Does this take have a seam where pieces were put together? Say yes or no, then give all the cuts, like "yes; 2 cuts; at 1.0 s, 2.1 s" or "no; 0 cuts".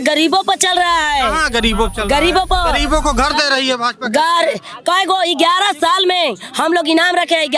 no; 0 cuts